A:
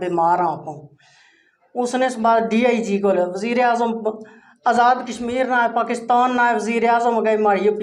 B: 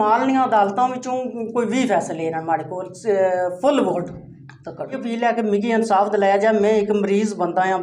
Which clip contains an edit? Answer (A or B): B